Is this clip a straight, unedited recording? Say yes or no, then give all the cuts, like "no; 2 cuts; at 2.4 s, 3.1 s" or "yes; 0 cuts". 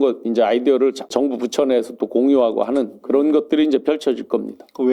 no; 1 cut; at 1.1 s